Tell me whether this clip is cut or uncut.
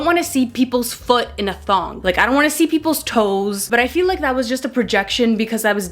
uncut